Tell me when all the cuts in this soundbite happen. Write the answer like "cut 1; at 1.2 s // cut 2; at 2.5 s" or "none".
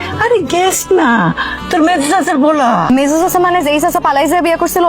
cut 1; at 2.9 s